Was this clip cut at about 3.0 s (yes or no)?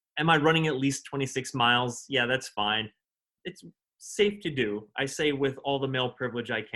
yes